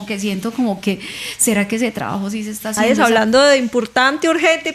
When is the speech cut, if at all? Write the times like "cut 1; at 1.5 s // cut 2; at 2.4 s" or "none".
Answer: cut 1; at 3.0 s